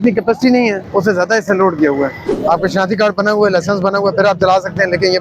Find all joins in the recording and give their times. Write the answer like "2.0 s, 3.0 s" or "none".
0.8 s, 2.3 s